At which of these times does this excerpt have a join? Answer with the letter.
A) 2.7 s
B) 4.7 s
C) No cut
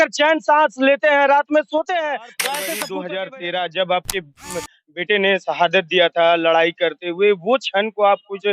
A